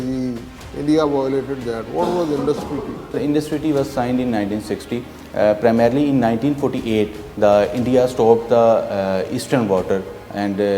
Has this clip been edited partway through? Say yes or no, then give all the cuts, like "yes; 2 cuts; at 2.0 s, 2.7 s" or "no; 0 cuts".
yes; 1 cut; at 3.1 s